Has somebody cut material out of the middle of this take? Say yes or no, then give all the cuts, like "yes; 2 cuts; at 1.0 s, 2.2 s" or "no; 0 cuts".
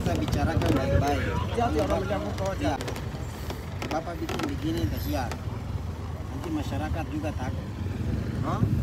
no; 0 cuts